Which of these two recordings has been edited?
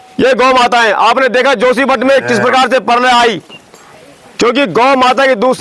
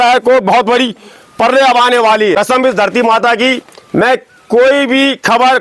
second; 1 cut; at 2.3 s

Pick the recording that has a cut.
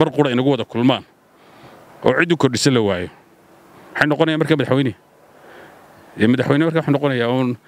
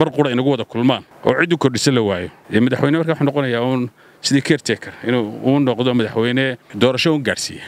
second; 3 cuts; at 1.1 s, 2.3 s, 6.6 s

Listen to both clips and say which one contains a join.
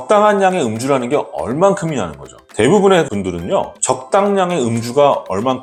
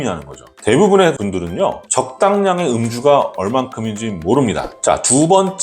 second; 1 cut; at 4.7 s

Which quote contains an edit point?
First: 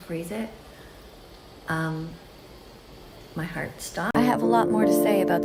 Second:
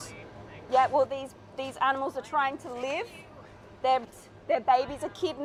first; 1 cut; at 4.1 s

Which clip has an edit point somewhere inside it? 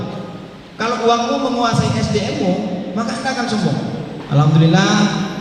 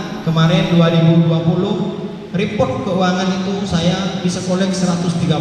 first; 1 cut; at 4.2 s

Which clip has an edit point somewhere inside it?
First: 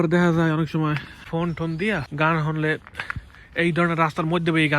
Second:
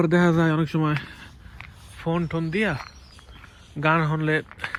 first; 2 cuts; at 1.1 s, 2.1 s

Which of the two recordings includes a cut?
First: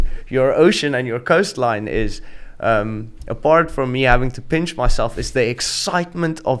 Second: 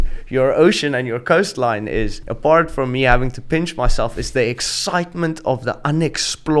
second; 1 cut; at 2.2 s

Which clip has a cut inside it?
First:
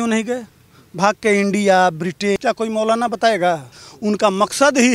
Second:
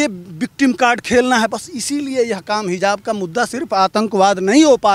first; 2 cuts; at 2.4 s, 3.7 s

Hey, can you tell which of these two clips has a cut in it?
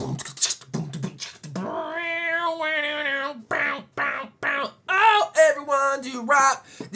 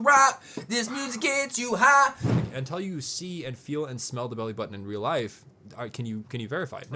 second; 1 cut; at 2.4 s

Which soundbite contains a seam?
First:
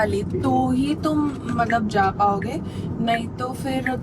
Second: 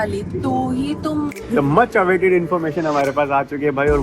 second; 1 cut; at 1.4 s

